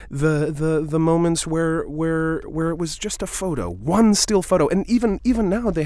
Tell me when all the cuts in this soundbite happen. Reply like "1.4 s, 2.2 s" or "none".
none